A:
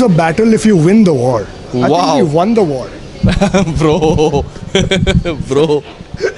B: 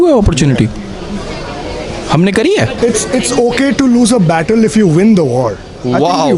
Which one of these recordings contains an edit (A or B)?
B